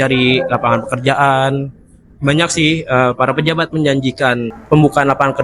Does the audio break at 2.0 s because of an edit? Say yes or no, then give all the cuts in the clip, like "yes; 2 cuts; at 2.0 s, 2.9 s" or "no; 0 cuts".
no; 1 cut; at 4.5 s